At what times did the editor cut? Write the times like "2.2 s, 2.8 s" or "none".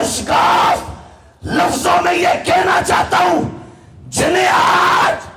none

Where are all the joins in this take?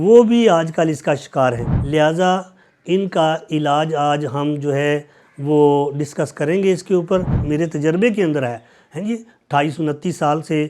1.7 s, 7.4 s

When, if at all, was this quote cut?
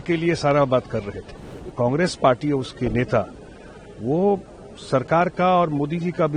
1.6 s

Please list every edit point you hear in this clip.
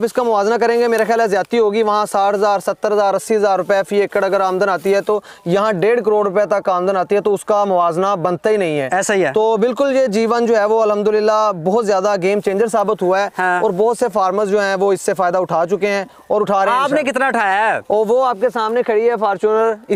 none

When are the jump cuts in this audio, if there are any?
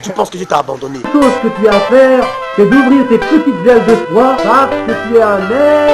1.0 s

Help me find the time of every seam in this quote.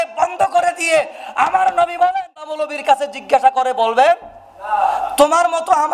2.6 s

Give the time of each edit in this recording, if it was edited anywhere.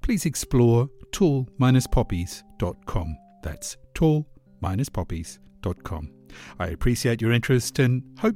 none

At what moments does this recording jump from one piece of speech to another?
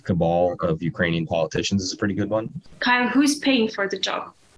2.6 s

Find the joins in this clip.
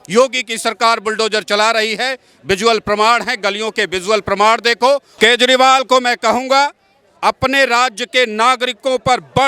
5.1 s

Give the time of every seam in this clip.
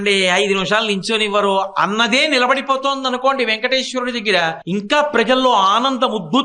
4.6 s

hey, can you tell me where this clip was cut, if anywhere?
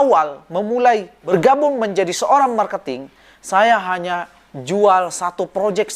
1.2 s

